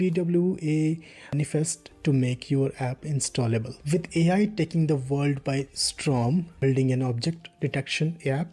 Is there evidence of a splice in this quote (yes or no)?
yes